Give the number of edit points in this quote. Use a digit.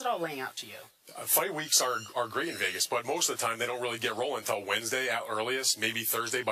1